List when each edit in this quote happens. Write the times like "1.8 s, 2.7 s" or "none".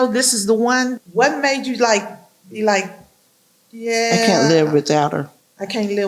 1.0 s